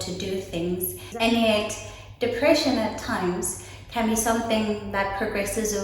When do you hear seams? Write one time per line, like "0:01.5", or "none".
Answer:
0:01.0

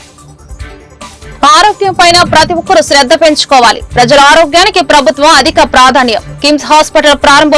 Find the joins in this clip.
0:01.3

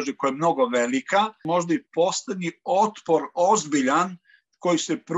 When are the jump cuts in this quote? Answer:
0:01.4

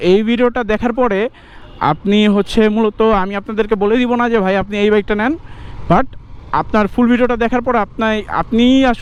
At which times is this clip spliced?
none

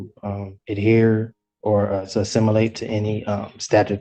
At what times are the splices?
none

